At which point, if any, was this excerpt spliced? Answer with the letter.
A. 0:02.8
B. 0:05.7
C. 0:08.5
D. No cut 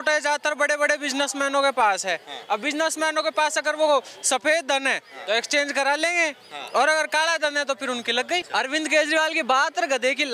C